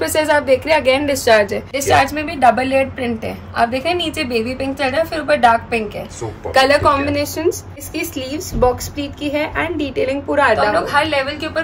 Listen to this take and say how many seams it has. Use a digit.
3